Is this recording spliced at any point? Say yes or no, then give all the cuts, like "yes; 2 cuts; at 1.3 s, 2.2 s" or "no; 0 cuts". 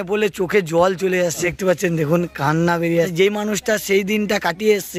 no; 0 cuts